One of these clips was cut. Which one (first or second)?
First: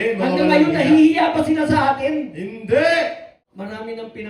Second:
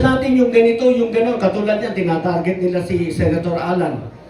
first